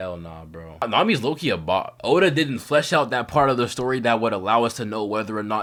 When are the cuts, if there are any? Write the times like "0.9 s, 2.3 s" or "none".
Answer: none